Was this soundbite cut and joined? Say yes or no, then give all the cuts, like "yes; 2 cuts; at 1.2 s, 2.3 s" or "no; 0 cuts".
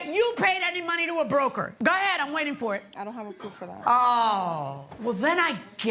no; 0 cuts